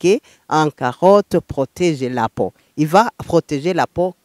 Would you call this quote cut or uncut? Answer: uncut